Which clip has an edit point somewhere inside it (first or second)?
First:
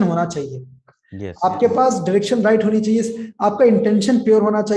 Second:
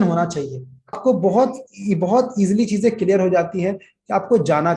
second